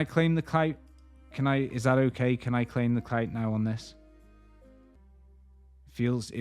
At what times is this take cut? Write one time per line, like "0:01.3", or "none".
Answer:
none